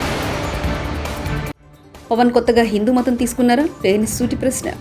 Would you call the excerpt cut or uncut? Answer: uncut